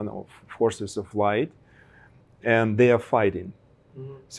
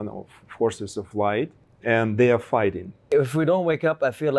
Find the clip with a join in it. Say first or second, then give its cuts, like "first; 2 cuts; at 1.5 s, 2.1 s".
second; 2 cuts; at 1.6 s, 3.1 s